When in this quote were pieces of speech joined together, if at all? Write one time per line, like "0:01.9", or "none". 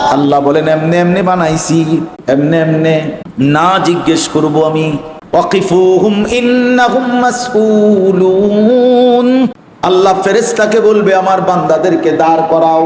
0:02.1
0:03.2
0:05.1
0:09.7

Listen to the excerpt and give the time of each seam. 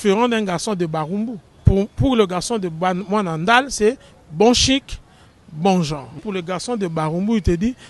0:01.5
0:06.2

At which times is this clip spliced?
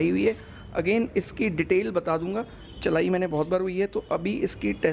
none

